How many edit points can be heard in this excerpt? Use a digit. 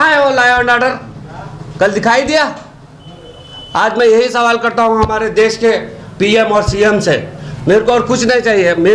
0